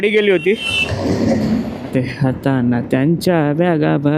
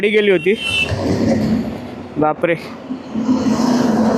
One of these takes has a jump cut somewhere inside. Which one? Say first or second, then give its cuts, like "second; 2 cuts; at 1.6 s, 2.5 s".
first; 1 cut; at 1.9 s